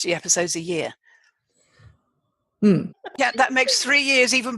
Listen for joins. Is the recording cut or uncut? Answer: cut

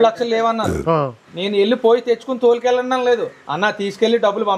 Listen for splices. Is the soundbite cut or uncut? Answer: uncut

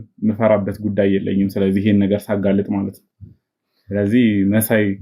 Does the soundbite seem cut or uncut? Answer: uncut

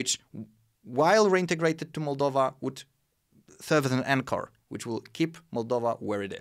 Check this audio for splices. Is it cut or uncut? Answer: uncut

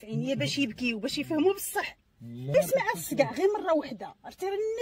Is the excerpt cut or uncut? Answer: cut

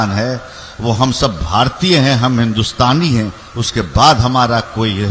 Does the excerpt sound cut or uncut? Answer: uncut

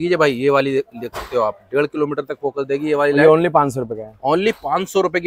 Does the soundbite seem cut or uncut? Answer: uncut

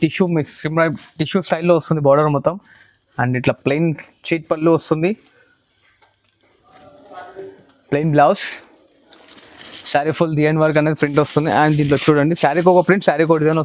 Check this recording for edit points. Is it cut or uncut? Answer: uncut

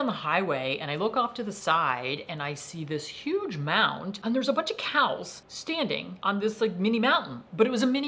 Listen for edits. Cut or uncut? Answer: uncut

